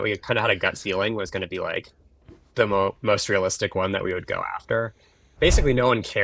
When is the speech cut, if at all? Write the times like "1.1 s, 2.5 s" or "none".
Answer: 5.3 s